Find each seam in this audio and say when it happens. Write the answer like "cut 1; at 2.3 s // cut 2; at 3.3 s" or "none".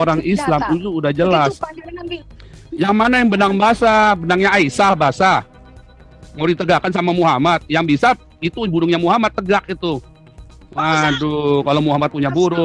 cut 1; at 2.0 s